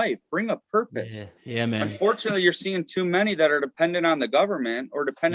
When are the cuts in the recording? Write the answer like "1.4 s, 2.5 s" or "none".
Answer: none